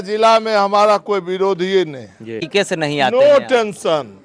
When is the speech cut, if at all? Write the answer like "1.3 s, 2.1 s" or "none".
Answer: 2.5 s